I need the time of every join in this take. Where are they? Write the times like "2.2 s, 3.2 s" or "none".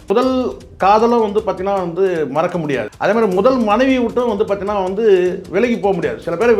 2.9 s